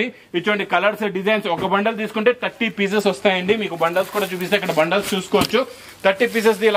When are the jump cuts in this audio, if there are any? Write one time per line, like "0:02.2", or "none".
none